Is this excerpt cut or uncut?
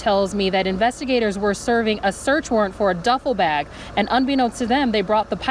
uncut